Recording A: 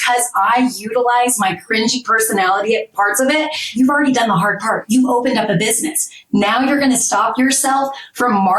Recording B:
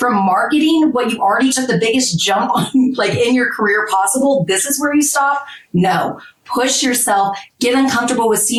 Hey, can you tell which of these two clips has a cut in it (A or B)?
A